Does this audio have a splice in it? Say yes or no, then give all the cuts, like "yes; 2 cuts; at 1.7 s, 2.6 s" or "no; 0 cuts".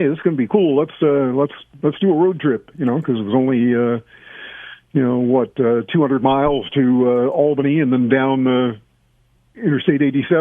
no; 0 cuts